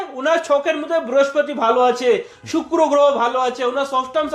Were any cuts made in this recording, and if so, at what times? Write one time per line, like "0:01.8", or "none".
none